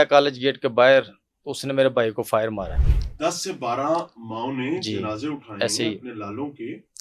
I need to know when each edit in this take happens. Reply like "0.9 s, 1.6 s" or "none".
2.8 s